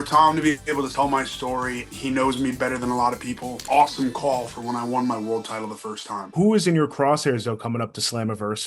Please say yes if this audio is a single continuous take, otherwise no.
no